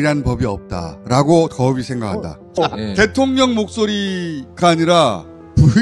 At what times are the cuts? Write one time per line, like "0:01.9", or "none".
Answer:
0:02.6